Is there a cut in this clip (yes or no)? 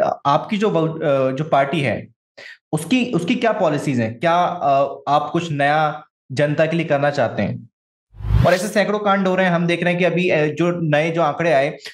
yes